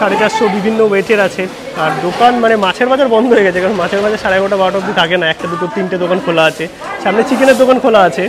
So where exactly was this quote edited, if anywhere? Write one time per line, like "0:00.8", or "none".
none